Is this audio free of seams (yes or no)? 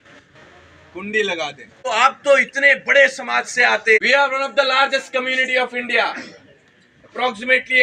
no